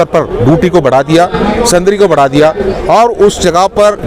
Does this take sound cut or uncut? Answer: uncut